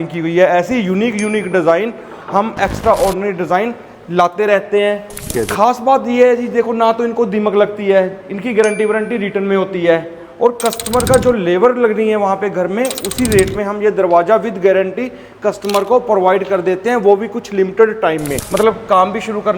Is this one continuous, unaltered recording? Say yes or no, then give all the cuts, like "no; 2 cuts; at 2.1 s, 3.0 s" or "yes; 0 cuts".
no; 2 cuts; at 5.3 s, 18.4 s